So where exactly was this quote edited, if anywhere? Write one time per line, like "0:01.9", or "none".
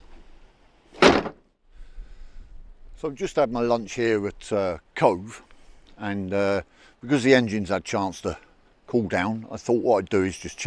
none

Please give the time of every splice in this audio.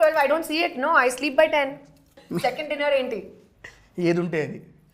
0:02.2

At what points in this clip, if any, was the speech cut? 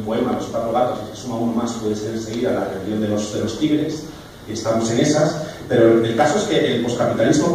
0:03.8

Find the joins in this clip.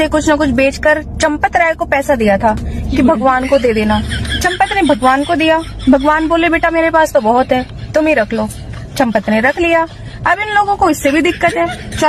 none

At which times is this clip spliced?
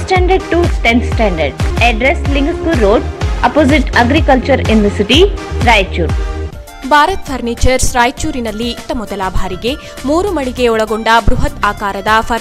0:01.6
0:06.4

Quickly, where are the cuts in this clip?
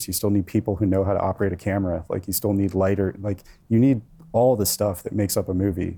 none

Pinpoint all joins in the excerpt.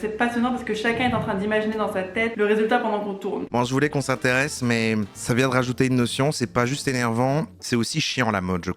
0:03.4

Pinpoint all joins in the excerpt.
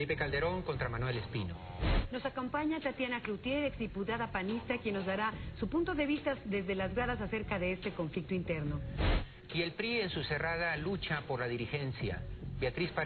0:11.0

